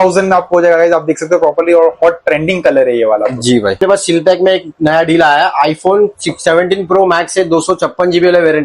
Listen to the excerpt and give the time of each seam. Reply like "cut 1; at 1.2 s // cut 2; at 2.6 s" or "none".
cut 1; at 3.8 s